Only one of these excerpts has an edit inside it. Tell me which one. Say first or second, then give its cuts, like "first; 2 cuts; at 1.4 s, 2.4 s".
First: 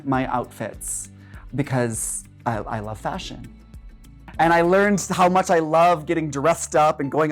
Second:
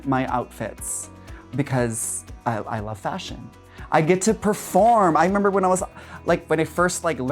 first; 1 cut; at 3.9 s